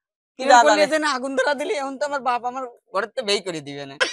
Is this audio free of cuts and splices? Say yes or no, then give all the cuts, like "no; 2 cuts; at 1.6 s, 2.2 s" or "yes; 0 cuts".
yes; 0 cuts